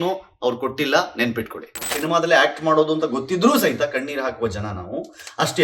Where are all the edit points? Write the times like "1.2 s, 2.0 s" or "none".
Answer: 2.0 s